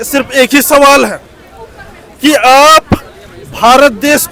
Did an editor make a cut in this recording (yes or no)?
no